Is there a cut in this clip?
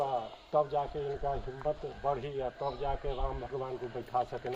no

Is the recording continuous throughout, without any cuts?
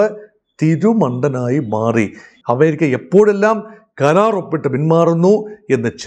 no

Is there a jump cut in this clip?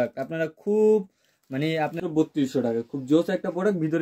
yes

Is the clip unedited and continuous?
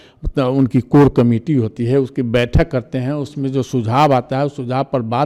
yes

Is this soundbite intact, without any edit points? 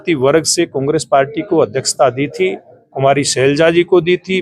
yes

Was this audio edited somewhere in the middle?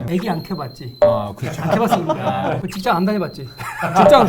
no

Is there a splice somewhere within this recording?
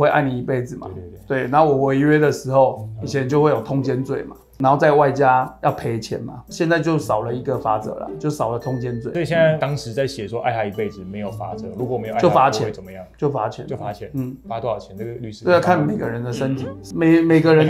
no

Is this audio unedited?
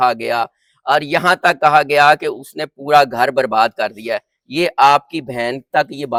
yes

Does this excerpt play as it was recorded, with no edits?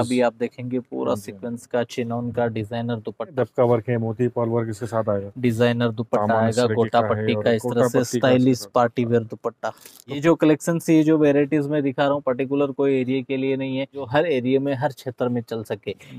no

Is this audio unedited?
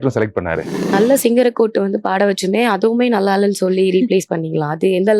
no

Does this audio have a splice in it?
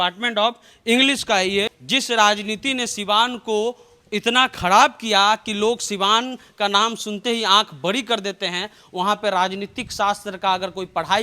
yes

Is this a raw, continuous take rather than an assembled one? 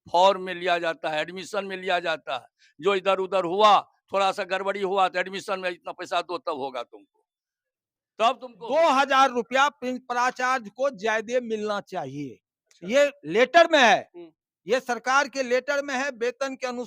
no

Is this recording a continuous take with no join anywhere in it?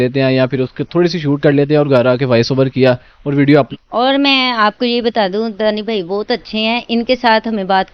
no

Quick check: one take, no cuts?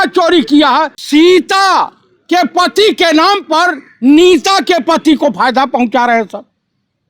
no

